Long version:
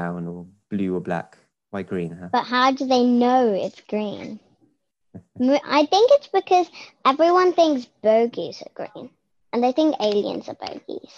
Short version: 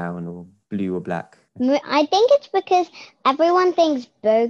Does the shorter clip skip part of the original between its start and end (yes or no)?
yes